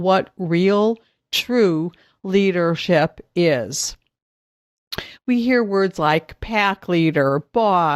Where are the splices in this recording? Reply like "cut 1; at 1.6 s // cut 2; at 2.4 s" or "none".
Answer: none